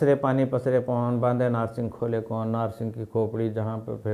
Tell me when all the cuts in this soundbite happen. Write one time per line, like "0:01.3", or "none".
none

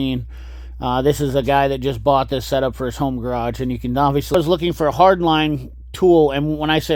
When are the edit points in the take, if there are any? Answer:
0:04.3

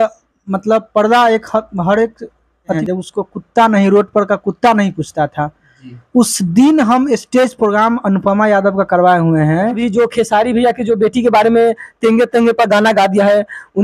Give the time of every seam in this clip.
0:02.8
0:09.8

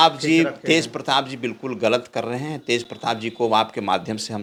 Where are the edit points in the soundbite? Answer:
none

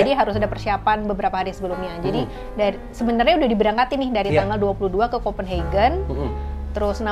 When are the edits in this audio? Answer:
none

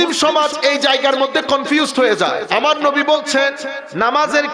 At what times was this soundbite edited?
0:02.4

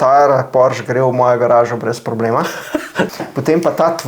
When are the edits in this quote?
0:03.1

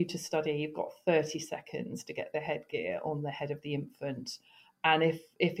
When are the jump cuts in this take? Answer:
none

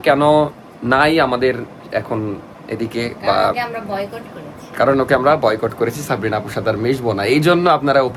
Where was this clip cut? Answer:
none

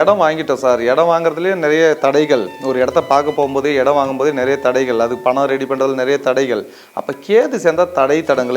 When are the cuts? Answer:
none

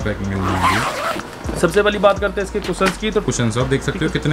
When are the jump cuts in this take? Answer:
0:03.2

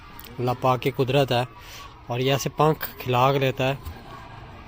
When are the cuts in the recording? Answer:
none

